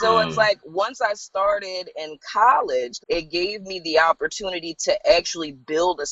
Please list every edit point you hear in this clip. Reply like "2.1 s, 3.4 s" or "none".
2.9 s